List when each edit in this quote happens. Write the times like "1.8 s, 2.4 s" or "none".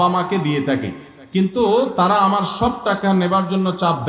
none